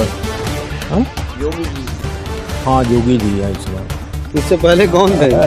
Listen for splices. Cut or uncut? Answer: uncut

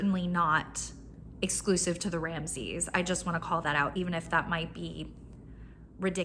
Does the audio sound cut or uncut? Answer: cut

